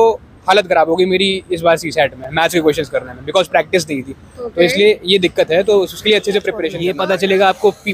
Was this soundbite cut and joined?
yes; 1 cut; at 6.7 s

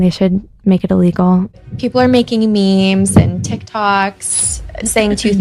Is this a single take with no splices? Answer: no; 1 cut; at 1.5 s

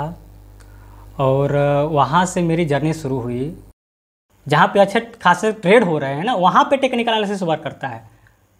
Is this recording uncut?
no; 1 cut; at 3.7 s

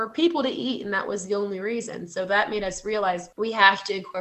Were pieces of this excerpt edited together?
yes; 1 cut; at 3.3 s

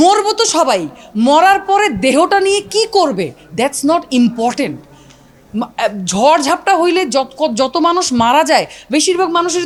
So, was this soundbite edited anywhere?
no; 0 cuts

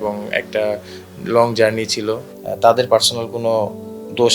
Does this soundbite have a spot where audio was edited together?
yes; 1 cut; at 2.3 s

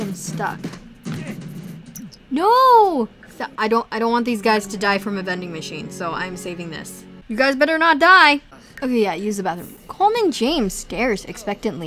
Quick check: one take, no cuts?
yes; 0 cuts

